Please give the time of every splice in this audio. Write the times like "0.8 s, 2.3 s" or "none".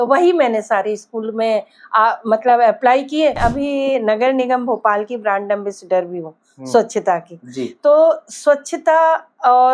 3.4 s